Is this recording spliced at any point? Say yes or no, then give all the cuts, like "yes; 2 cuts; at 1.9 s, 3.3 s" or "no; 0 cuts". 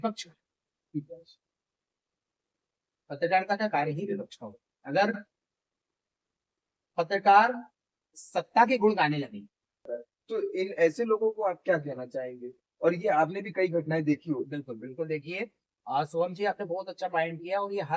yes; 1 cut; at 9.8 s